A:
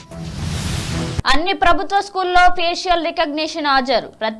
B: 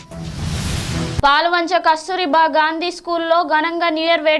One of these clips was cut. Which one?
A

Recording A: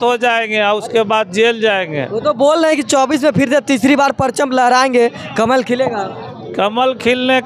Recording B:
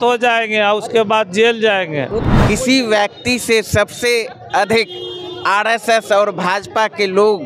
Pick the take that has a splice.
B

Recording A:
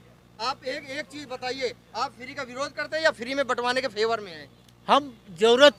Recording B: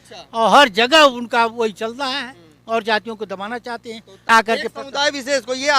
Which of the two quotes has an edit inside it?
B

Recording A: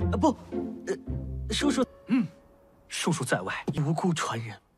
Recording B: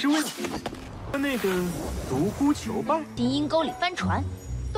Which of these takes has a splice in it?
A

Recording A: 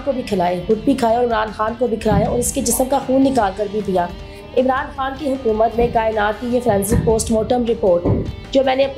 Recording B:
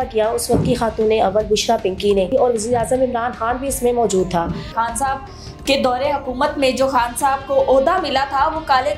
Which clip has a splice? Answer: B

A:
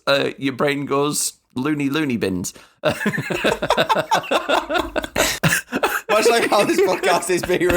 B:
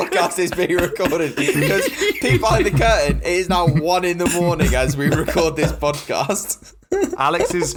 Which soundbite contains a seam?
A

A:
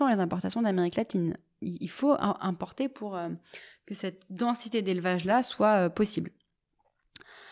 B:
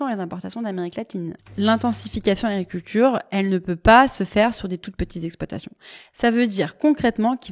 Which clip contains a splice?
B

